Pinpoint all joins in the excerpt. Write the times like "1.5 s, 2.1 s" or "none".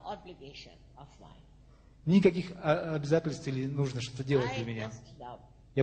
4.7 s